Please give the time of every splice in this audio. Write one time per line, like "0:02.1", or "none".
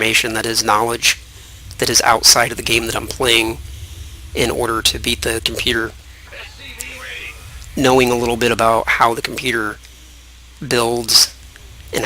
0:01.9